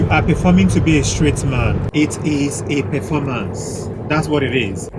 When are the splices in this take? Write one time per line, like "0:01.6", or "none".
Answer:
none